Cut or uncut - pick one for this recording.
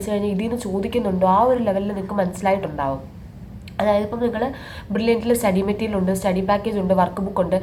uncut